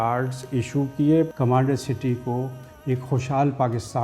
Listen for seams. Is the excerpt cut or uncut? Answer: cut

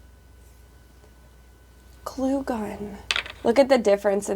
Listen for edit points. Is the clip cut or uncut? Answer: uncut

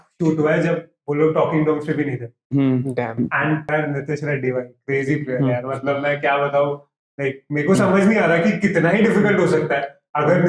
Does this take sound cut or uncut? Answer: cut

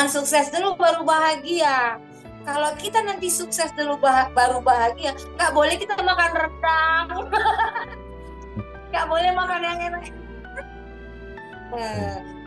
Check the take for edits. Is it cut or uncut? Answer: uncut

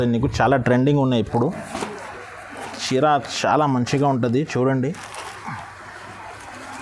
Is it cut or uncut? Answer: uncut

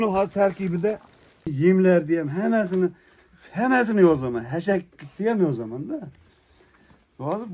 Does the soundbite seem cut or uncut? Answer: cut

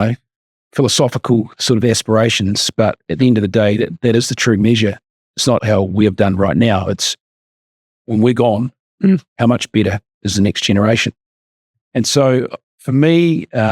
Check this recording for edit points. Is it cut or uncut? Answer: cut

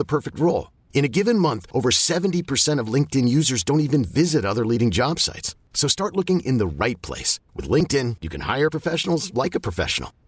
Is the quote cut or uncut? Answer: uncut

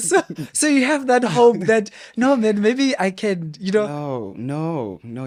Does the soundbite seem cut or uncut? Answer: uncut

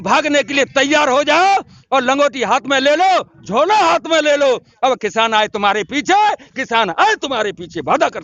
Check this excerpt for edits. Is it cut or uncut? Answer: uncut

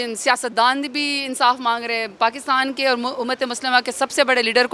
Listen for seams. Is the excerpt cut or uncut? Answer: uncut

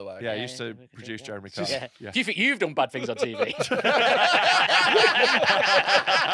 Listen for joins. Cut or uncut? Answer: uncut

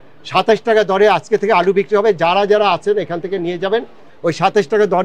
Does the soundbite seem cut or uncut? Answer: cut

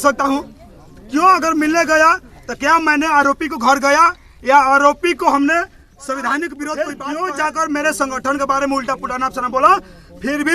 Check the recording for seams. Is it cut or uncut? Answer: cut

